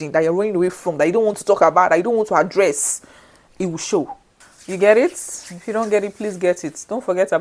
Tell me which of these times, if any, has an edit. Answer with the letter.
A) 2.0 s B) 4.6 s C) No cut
B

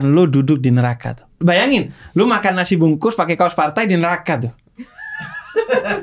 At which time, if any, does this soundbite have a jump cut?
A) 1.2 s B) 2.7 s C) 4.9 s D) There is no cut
A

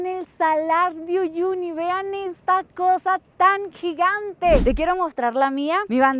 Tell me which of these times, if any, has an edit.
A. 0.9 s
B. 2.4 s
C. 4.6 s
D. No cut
C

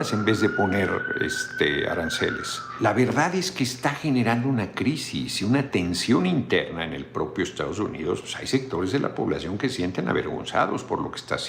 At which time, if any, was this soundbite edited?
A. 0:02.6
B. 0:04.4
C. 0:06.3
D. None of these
A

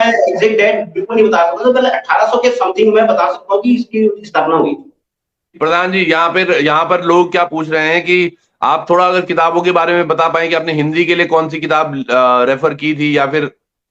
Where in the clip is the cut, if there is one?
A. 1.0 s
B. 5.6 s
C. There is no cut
B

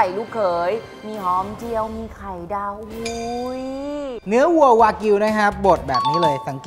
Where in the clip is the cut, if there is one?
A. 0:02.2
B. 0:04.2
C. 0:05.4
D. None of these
B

